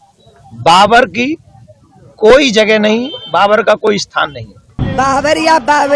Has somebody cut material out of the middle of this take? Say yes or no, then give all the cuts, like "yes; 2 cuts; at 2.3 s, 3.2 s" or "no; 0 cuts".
yes; 1 cut; at 4.7 s